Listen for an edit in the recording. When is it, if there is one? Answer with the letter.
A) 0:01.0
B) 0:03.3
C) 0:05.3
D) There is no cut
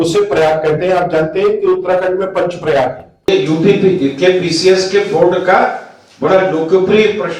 B